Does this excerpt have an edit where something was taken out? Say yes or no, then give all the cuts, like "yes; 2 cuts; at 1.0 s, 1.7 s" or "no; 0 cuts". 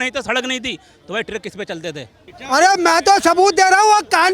yes; 1 cut; at 2.3 s